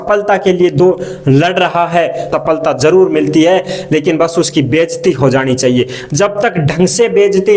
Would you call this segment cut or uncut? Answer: cut